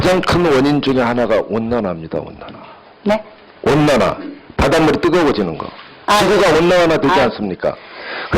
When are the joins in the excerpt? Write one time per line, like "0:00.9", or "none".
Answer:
0:05.3

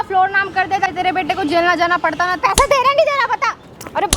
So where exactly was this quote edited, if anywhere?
0:00.9
0:02.4

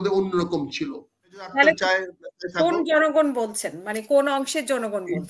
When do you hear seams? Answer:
0:01.5

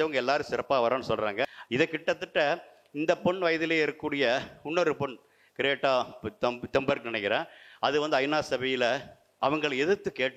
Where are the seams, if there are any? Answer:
0:01.6

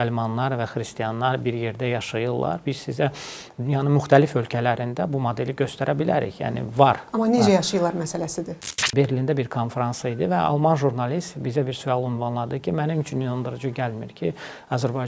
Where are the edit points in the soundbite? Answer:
0:08.7

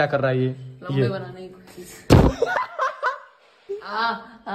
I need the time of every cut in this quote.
0:03.6

